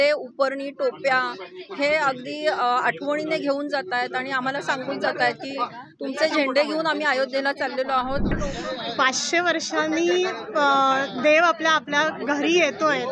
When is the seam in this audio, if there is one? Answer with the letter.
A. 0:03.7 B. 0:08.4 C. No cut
B